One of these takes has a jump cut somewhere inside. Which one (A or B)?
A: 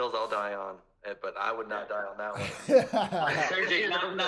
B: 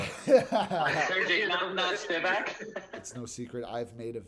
B